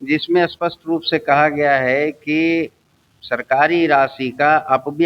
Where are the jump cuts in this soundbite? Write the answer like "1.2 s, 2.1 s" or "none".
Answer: none